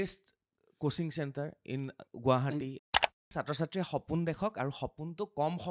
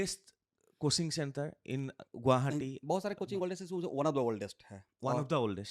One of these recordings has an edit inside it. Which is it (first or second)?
first